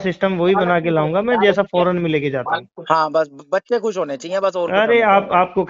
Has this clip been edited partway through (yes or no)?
no